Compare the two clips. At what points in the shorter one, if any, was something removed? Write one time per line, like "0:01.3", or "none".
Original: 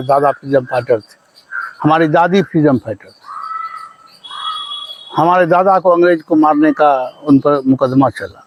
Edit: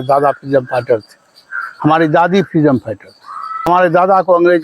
0:03.7